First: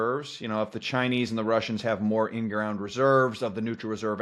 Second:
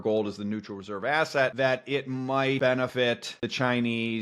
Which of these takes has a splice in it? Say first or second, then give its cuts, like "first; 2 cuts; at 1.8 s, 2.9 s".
second; 2 cuts; at 1.5 s, 2.9 s